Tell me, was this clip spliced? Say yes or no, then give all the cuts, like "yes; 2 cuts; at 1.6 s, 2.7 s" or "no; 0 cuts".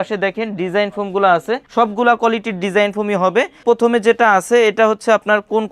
no; 0 cuts